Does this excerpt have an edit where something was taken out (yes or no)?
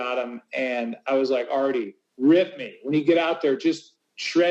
no